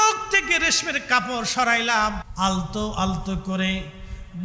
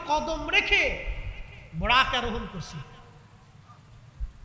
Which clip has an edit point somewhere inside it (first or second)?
first